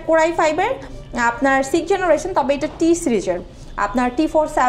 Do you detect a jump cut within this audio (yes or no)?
no